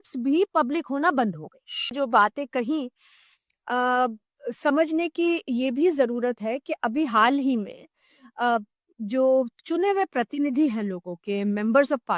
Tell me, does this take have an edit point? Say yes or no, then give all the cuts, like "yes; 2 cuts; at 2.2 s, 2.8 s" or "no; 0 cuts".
yes; 1 cut; at 1.9 s